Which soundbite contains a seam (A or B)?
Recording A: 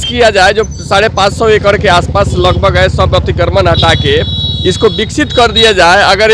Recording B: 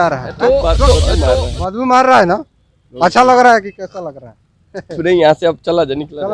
B